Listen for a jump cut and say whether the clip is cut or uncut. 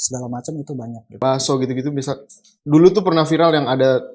cut